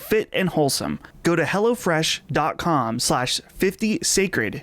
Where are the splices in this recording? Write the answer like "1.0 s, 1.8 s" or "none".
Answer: 1.1 s